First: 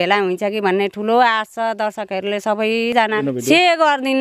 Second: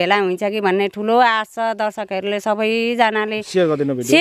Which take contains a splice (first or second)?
first